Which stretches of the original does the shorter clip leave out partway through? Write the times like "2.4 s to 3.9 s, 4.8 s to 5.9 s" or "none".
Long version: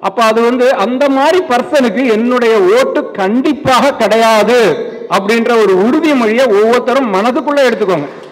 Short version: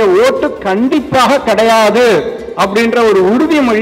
none